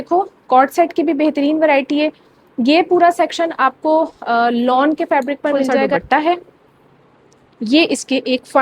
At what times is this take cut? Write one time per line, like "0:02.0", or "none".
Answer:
0:05.9

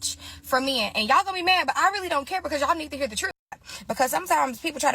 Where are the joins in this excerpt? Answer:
0:03.7

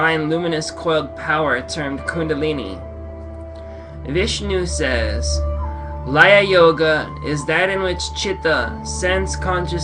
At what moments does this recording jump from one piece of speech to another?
0:01.9

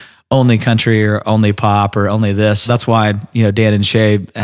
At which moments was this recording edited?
0:02.7

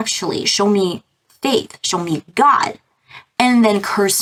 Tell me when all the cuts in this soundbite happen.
none

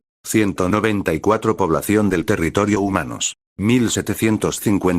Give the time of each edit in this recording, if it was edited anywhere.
0:02.7

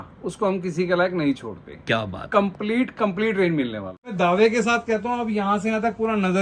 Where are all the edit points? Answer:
0:04.1

